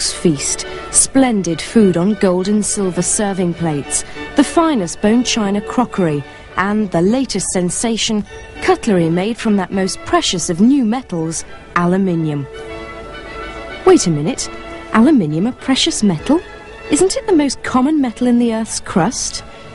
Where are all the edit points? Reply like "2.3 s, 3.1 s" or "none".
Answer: 2.7 s